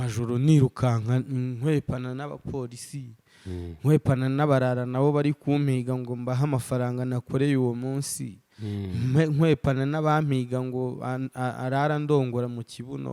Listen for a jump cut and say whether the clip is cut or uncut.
uncut